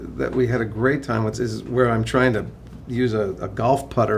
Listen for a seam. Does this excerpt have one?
yes; 1 cut; at 1.3 s

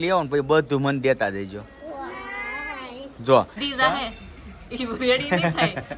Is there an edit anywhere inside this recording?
yes; 1 cut; at 3.6 s

